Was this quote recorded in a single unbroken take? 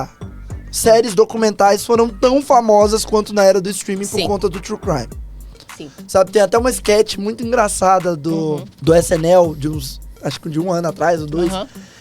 no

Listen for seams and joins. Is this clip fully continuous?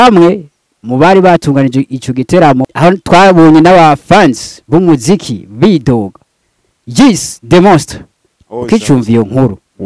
no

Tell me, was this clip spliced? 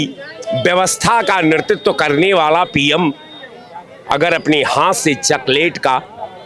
no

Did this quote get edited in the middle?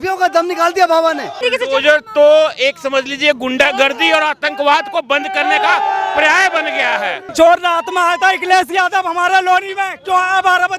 yes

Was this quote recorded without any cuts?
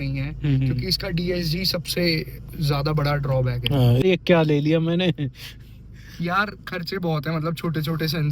no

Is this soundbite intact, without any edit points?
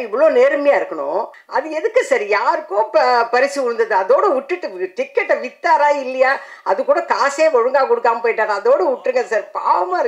no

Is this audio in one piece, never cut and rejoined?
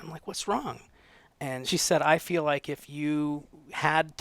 no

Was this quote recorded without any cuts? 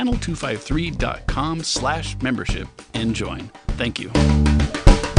yes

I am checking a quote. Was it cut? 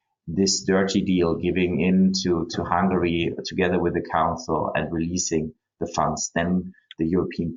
no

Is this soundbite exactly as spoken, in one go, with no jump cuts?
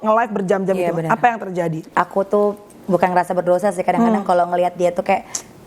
no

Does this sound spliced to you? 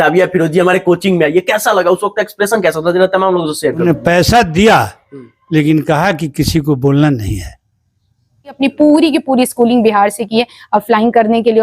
yes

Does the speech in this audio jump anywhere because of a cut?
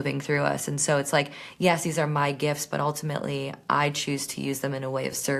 no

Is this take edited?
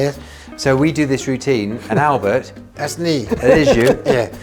no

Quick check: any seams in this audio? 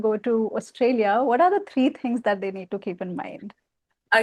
no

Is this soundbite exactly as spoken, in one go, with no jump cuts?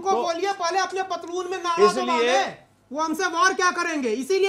yes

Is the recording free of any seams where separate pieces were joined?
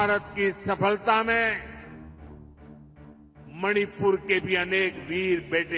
no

